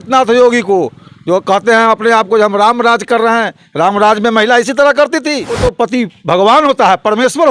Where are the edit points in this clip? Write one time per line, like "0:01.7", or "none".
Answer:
0:05.5